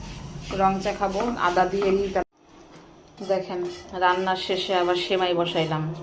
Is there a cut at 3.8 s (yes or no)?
no